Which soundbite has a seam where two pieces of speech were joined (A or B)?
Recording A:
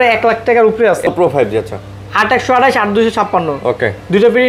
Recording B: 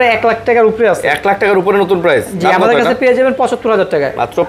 A